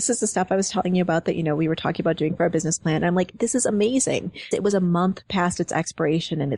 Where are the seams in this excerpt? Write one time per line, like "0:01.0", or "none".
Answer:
0:04.5